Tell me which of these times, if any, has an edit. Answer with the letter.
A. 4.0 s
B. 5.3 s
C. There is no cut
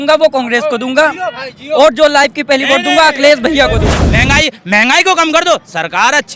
A